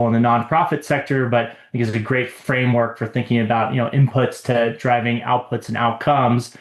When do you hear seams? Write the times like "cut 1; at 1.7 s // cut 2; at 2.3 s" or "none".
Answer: none